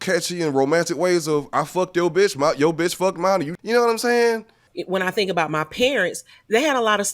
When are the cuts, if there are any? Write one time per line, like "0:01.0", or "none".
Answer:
0:03.5
0:04.4